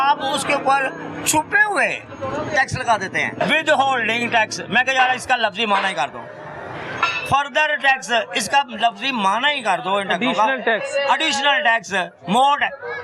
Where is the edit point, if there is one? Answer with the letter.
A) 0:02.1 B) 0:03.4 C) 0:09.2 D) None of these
B